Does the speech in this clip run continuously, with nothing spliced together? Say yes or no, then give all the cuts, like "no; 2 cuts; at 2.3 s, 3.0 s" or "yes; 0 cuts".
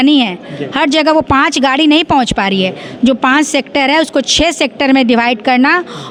yes; 0 cuts